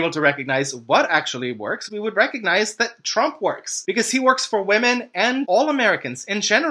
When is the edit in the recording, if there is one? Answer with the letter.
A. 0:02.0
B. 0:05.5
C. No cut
B